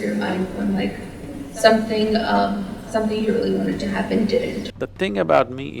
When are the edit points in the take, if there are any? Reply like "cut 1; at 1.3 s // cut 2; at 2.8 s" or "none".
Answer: cut 1; at 4.7 s